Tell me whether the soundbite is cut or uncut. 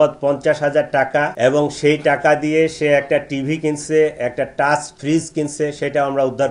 cut